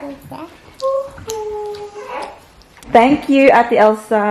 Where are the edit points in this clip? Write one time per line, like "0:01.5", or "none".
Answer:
0:02.7